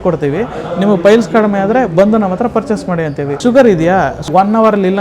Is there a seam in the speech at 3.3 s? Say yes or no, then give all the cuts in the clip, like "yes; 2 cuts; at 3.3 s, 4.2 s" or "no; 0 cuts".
yes; 2 cuts; at 3.3 s, 4.2 s